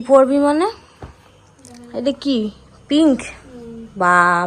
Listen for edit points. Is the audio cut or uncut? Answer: uncut